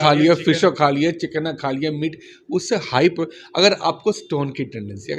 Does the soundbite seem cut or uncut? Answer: uncut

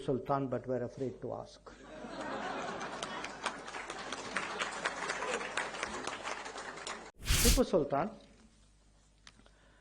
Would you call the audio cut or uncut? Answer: cut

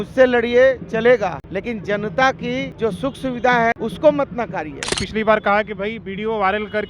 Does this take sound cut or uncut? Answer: cut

